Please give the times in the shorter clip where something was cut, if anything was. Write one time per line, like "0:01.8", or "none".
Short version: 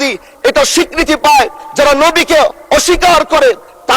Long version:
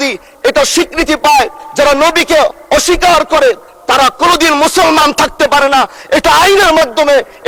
none